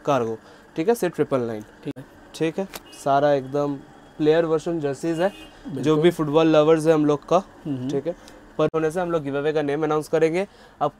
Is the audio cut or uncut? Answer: cut